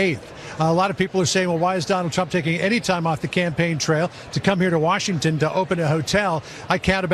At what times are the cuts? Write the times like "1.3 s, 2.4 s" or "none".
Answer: 1.0 s